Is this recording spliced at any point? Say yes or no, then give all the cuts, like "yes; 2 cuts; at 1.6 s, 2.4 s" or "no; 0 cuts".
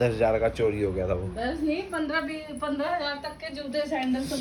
no; 0 cuts